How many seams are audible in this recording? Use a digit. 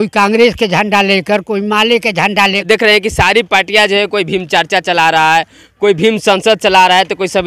1